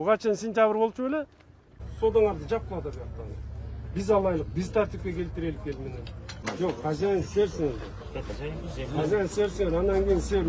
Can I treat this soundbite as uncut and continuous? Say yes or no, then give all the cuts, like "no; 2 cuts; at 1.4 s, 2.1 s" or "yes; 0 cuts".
no; 2 cuts; at 1.8 s, 6.4 s